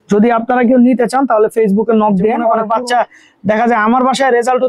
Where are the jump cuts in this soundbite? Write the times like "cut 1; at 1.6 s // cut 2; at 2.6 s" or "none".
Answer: cut 1; at 2.6 s